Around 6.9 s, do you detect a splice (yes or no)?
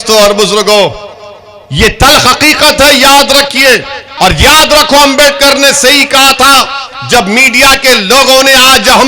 no